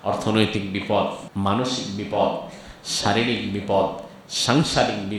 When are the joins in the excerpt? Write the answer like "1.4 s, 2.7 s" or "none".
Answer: 1.2 s